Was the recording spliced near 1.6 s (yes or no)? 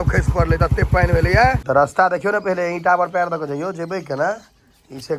yes